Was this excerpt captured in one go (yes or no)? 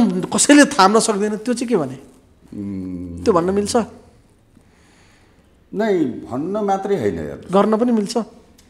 yes